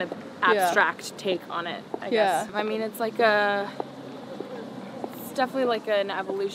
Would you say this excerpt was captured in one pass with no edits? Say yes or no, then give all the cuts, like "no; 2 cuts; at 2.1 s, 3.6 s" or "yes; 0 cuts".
no; 1 cut; at 2.5 s